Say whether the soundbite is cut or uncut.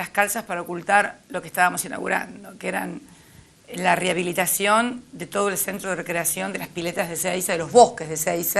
uncut